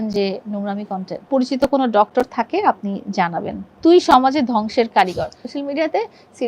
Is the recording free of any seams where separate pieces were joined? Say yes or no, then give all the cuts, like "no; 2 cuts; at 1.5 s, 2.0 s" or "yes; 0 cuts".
no; 3 cuts; at 1.3 s, 3.6 s, 5.4 s